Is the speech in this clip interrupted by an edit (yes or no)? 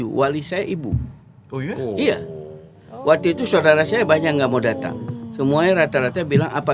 no